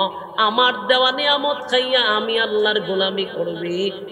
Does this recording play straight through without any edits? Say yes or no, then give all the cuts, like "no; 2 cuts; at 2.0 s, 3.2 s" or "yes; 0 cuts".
yes; 0 cuts